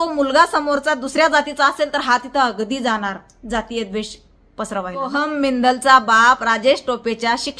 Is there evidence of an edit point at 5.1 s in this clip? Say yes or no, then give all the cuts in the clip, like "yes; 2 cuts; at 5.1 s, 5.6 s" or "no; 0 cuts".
yes; 1 cut; at 5.1 s